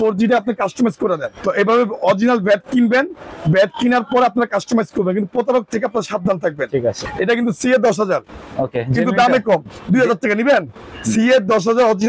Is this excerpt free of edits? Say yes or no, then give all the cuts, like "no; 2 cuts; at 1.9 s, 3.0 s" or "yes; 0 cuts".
no; 2 cuts; at 1.3 s, 7.0 s